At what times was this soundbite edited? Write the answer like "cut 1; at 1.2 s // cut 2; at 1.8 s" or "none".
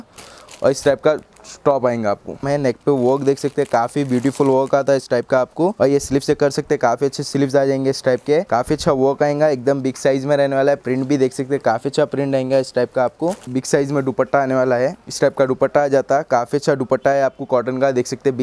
cut 1; at 2.4 s // cut 2; at 5.7 s // cut 3; at 8.5 s // cut 4; at 13.5 s

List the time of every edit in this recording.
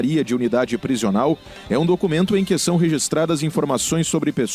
none

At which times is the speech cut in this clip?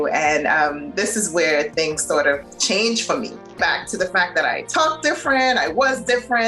cut 1; at 2.5 s // cut 2; at 3.5 s

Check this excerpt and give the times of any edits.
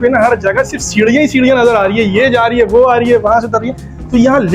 none

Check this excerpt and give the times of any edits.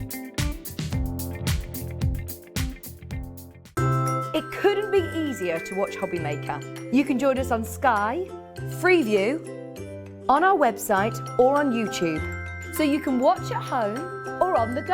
cut 1; at 3.5 s

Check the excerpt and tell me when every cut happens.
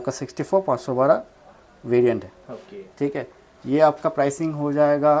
none

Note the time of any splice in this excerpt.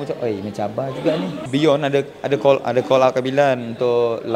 cut 1; at 1.4 s

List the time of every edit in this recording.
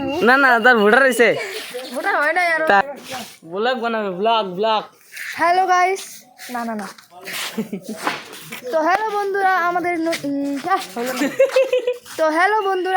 cut 1; at 2.8 s

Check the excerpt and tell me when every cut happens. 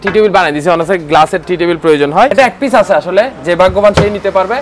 cut 1; at 2.3 s

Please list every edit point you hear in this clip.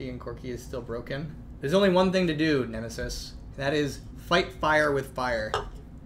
cut 1; at 1.4 s

